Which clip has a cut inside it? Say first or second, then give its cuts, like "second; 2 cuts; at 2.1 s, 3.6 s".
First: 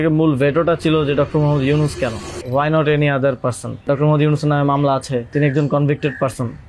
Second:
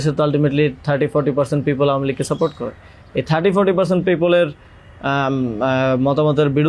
first; 3 cuts; at 2.3 s, 3.8 s, 5.3 s